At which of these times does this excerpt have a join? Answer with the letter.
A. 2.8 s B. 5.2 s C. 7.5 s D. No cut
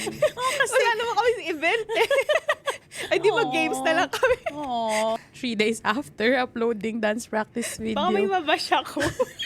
B